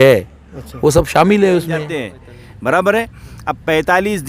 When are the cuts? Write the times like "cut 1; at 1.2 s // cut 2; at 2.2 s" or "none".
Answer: cut 1; at 1.8 s